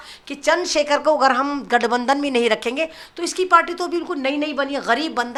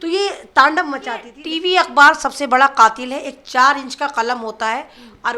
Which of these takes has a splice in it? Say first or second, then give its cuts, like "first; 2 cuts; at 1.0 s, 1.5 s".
second; 1 cut; at 1.3 s